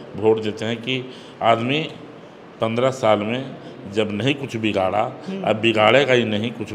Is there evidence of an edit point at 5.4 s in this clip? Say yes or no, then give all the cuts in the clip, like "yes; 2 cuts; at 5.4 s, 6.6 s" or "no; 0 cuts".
no; 0 cuts